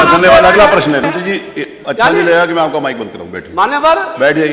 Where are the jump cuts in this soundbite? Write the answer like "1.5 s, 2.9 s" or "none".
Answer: 1.0 s